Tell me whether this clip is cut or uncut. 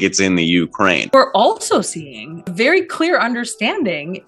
cut